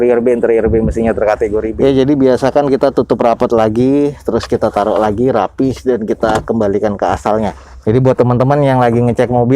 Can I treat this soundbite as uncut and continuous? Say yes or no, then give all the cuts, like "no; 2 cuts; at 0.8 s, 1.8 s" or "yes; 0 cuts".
no; 1 cut; at 1.7 s